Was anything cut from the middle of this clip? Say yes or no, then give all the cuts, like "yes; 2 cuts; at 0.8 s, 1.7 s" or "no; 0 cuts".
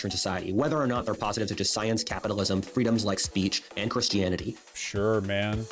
yes; 1 cut; at 4.6 s